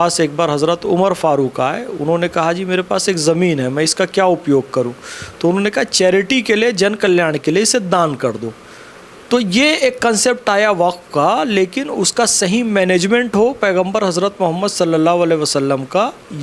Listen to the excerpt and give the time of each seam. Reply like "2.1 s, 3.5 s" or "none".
none